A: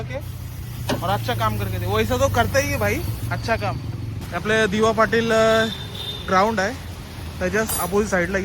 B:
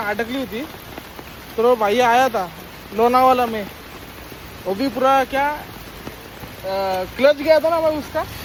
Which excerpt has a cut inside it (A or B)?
A